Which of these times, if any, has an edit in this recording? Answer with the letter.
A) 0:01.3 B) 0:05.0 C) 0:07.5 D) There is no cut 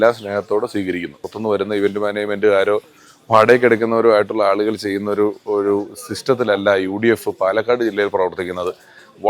A